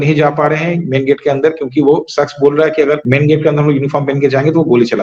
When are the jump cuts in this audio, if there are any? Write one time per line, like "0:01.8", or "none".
0:03.0